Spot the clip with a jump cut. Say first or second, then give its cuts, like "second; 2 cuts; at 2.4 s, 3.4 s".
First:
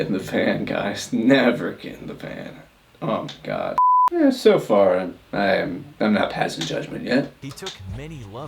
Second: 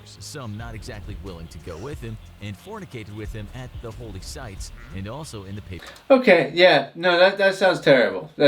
first; 1 cut; at 3.9 s